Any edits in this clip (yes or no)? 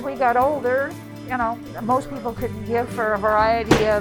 yes